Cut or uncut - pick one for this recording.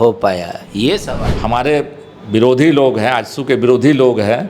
cut